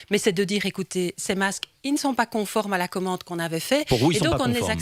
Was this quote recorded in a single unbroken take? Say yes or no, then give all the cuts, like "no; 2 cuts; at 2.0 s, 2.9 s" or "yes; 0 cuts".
yes; 0 cuts